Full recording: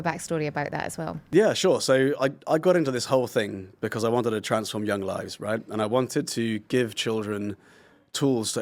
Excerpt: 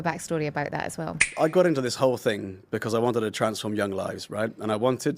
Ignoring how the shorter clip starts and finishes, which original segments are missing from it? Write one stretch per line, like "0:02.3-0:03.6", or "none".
0:01.3-0:02.4